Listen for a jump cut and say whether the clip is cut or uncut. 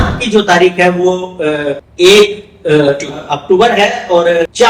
uncut